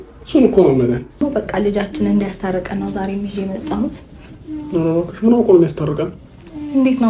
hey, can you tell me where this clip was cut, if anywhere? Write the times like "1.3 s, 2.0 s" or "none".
1.2 s